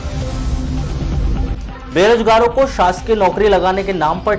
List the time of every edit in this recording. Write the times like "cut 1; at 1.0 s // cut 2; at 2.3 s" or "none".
cut 1; at 1.5 s